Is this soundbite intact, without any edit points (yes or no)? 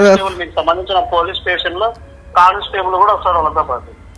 yes